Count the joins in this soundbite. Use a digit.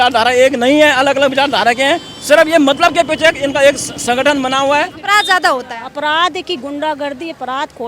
1